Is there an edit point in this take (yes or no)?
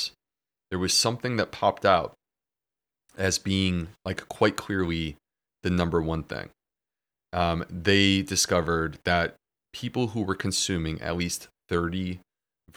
no